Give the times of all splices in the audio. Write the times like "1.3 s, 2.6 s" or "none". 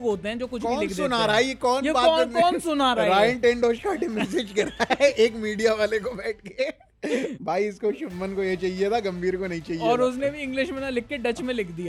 none